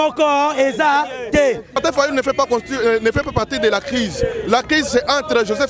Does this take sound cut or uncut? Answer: cut